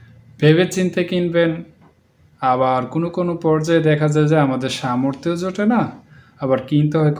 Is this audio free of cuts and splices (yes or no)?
yes